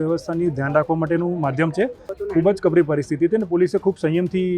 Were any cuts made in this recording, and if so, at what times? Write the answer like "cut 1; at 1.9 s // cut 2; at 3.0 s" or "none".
cut 1; at 2.1 s